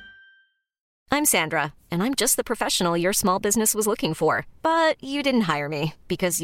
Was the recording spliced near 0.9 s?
yes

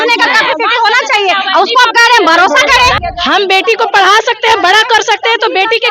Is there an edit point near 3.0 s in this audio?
yes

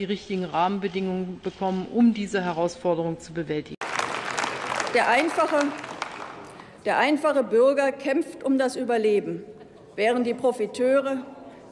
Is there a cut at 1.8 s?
no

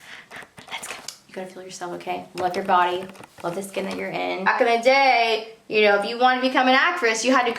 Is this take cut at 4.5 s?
yes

